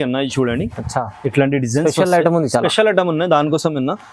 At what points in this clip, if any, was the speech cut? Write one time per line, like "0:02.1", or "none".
none